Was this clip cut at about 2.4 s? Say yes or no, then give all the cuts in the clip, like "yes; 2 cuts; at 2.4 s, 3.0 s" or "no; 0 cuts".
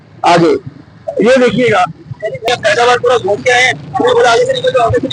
yes; 1 cut; at 2.4 s